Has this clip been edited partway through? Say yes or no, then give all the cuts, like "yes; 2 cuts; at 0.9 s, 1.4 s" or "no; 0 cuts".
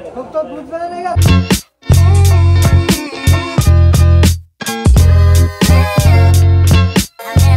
yes; 1 cut; at 1.2 s